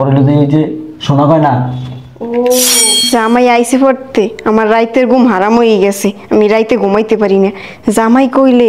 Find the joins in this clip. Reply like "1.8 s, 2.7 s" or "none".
3.1 s